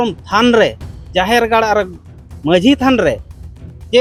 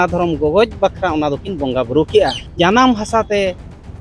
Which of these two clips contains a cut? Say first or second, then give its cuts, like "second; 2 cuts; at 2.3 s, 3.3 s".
second; 1 cut; at 2.4 s